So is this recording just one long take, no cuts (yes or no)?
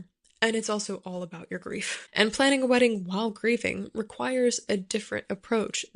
no